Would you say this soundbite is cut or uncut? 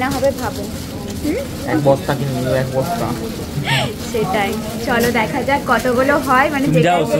uncut